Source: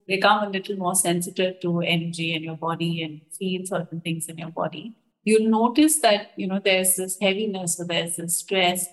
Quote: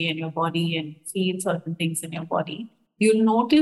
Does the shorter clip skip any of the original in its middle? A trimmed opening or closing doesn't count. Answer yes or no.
no